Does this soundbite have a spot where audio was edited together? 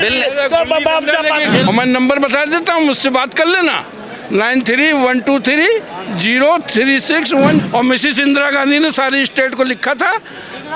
yes; 2 cuts; at 1.7 s, 7.6 s

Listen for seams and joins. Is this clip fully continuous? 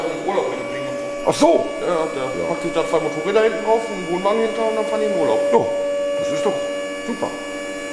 yes; 0 cuts

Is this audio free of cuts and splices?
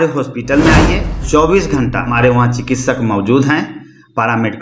no; 2 cuts; at 1.2 s, 2.1 s

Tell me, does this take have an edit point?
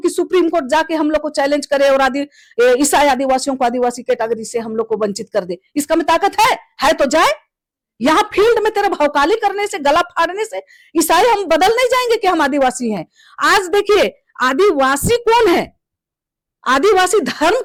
no; 0 cuts

